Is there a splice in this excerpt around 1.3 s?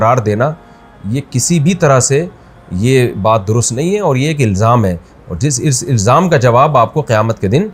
no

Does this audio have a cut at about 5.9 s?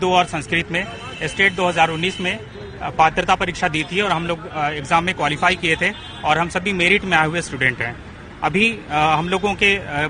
no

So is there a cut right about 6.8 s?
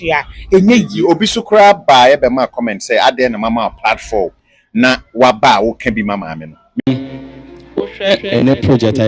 yes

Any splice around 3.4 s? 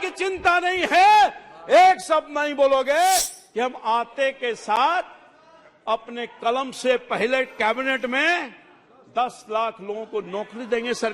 yes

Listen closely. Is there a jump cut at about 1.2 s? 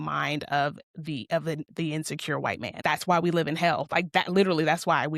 no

